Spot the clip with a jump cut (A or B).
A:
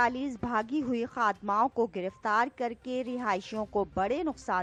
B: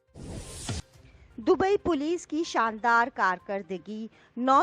B